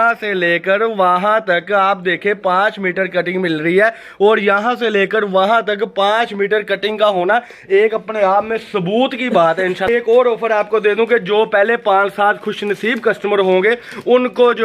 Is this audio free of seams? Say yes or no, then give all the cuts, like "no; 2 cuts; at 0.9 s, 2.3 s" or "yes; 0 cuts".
no; 1 cut; at 9.8 s